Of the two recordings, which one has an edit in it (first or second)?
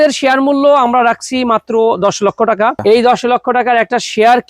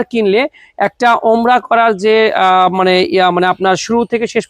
first